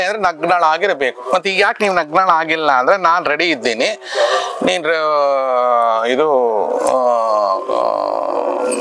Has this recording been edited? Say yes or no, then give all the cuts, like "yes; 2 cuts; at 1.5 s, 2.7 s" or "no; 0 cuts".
no; 0 cuts